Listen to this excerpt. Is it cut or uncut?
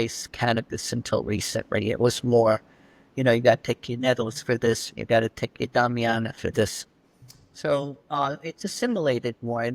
uncut